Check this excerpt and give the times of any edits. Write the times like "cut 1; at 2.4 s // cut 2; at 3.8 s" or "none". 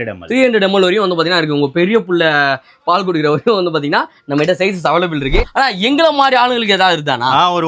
cut 1; at 5.4 s